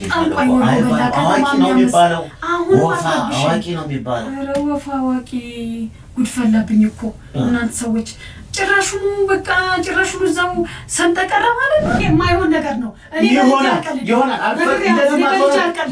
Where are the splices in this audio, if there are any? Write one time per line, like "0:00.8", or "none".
0:12.0